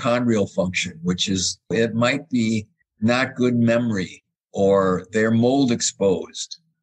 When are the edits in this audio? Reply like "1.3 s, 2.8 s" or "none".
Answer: 1.7 s